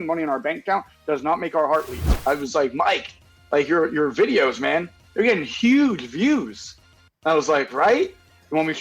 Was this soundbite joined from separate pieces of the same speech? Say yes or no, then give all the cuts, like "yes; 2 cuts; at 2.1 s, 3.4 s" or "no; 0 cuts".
yes; 1 cut; at 2.1 s